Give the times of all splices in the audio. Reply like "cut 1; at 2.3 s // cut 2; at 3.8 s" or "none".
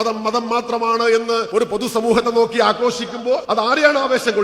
cut 1; at 1.5 s // cut 2; at 3.4 s